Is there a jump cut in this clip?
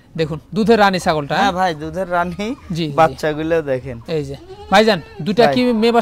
no; 0 cuts

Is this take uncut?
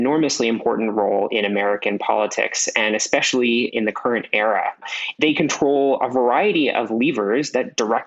yes; 0 cuts

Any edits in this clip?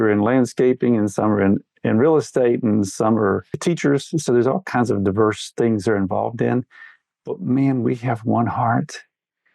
yes; 1 cut; at 3.6 s

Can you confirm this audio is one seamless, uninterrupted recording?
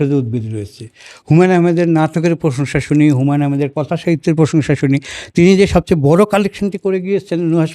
yes; 0 cuts

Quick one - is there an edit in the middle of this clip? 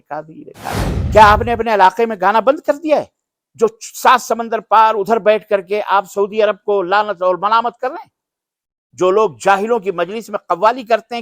yes; 1 cut; at 0.9 s

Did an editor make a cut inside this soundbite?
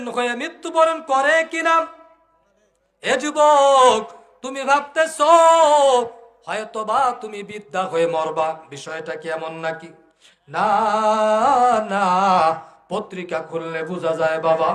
no; 0 cuts

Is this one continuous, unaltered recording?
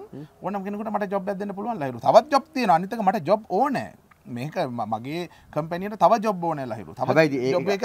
yes; 0 cuts

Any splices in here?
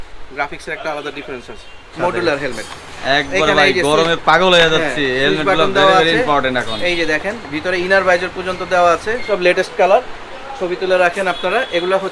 yes; 2 cuts; at 1.9 s, 9.3 s

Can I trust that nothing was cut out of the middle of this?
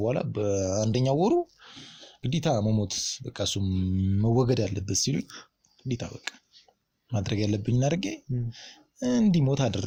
yes; 0 cuts

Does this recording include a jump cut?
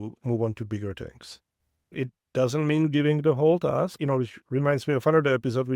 yes; 2 cuts; at 1.9 s, 3.9 s

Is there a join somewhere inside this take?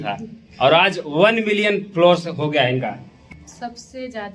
yes; 1 cut; at 3.2 s

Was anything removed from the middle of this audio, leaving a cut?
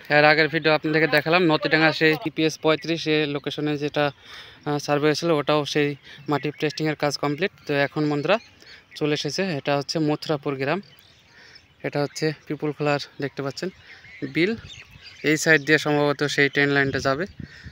no; 0 cuts

